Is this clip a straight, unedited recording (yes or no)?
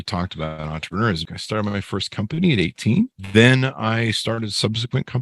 no